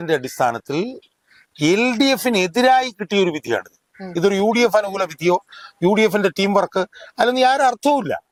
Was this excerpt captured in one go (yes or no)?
yes